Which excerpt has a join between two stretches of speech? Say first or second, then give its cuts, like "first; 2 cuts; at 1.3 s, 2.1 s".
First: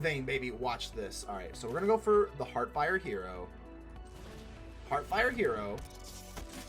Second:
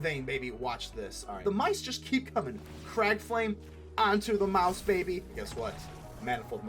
second; 2 cuts; at 1.3 s, 5.3 s